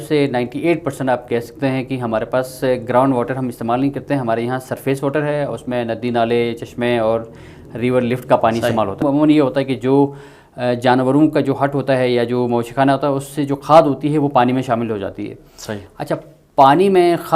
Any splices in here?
yes; 1 cut; at 9.0 s

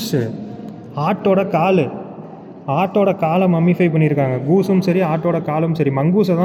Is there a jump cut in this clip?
no; 0 cuts

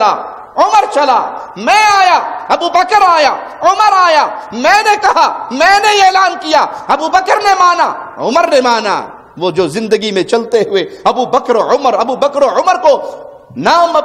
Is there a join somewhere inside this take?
no; 0 cuts

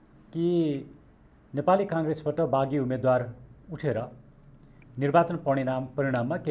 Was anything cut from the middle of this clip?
no; 0 cuts

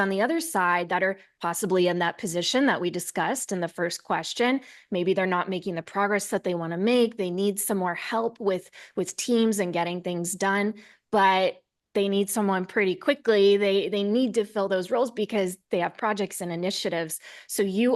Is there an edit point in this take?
no; 0 cuts

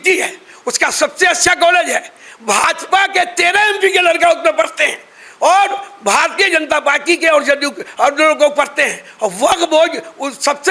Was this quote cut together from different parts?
no; 0 cuts

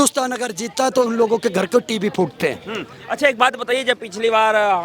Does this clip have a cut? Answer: no; 0 cuts

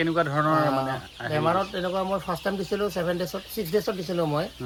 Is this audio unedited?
yes; 0 cuts

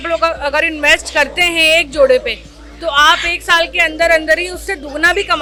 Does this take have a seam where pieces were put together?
no; 0 cuts

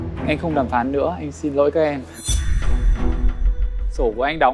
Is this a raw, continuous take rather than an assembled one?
yes; 0 cuts

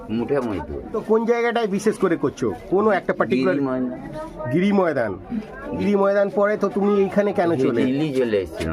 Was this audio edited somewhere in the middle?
yes; 3 cuts; at 1.0 s, 5.8 s, 7.8 s

